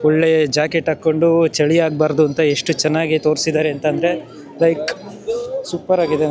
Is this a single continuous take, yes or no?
yes